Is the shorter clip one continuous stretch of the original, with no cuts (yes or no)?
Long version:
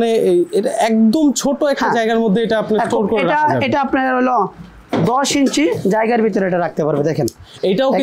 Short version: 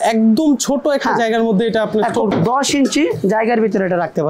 no